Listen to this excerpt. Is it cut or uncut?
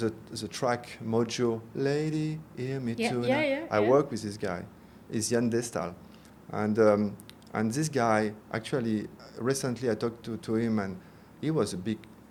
uncut